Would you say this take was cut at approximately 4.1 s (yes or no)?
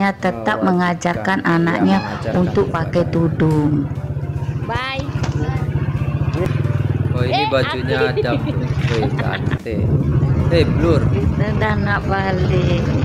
no